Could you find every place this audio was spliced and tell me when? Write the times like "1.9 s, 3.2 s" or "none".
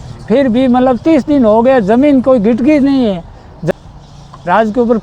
3.6 s